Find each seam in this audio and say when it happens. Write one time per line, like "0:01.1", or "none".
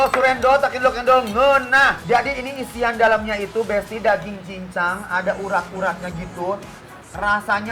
none